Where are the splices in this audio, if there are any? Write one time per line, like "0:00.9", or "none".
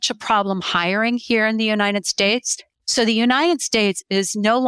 0:02.6